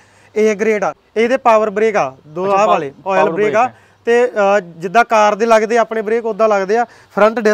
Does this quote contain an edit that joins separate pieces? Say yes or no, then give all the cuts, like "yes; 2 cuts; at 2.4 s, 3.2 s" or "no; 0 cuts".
yes; 1 cut; at 1.0 s